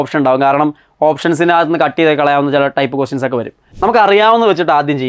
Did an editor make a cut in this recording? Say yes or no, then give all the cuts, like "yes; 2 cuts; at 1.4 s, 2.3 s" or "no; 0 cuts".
yes; 1 cut; at 3.7 s